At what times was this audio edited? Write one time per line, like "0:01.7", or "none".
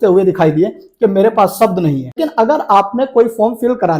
0:02.2